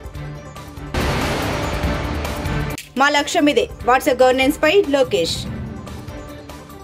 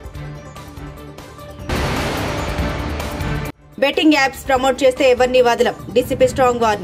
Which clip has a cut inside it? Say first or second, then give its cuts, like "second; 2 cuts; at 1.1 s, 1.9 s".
first; 1 cut; at 0.9 s